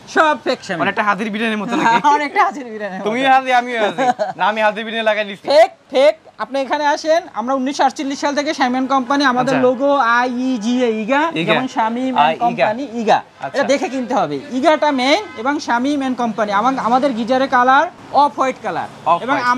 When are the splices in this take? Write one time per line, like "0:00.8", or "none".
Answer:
none